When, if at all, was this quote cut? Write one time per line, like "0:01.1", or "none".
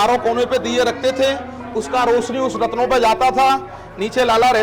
none